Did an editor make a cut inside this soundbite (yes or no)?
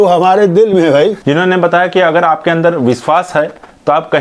yes